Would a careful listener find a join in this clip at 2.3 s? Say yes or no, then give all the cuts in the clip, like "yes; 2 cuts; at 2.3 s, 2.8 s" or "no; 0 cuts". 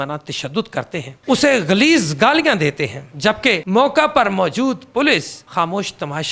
no; 0 cuts